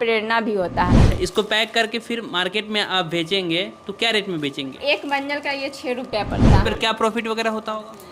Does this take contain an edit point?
yes; 3 cuts; at 1.0 s, 4.8 s, 6.6 s

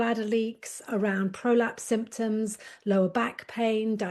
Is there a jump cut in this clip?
no; 0 cuts

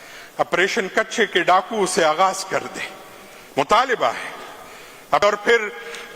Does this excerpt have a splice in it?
yes; 1 cut; at 5.2 s

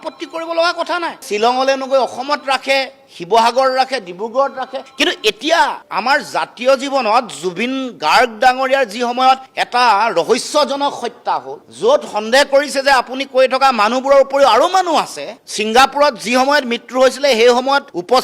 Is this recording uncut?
yes; 0 cuts

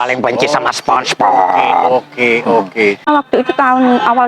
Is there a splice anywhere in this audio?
yes; 1 cut; at 3.1 s

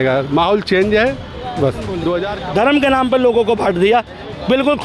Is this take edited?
yes; 1 cut; at 2.3 s

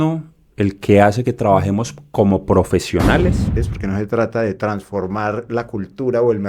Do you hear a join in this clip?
yes; 1 cut; at 3.6 s

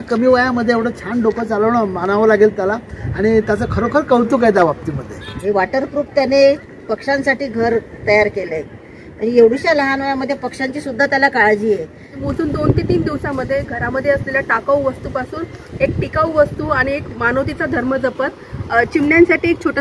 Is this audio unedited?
no; 2 cuts; at 5.2 s, 12.2 s

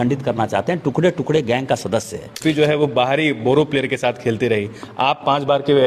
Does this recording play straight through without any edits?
no; 1 cut; at 2.2 s

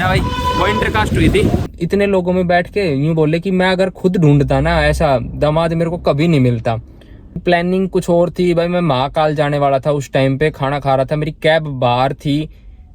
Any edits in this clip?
yes; 2 cuts; at 1.7 s, 7.4 s

